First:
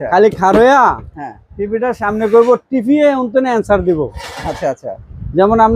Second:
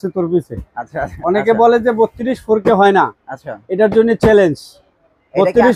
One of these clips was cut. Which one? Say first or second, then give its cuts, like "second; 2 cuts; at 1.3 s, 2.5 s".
second; 1 cut; at 1.1 s